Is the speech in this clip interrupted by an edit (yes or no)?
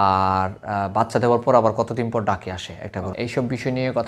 yes